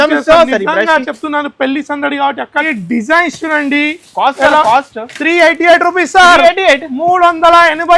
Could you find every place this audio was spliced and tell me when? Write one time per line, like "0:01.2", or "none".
0:02.7